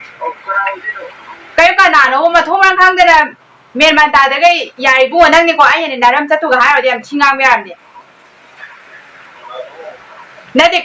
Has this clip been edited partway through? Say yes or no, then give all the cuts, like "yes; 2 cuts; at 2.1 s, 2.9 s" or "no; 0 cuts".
no; 0 cuts